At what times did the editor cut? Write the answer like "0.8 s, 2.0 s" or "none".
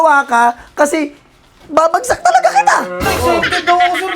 3.0 s